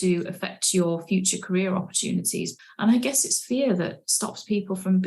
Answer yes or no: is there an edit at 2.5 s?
yes